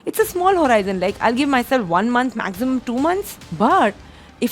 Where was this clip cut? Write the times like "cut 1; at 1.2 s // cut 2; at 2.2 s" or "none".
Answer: cut 1; at 3.4 s